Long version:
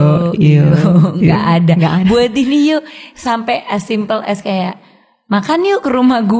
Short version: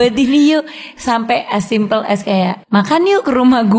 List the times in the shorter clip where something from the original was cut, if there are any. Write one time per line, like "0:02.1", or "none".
0:02.6